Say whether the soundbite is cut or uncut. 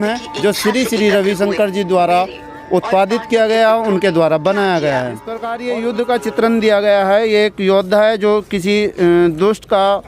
cut